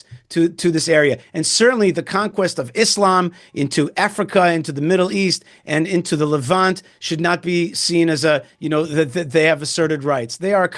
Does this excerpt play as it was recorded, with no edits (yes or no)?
yes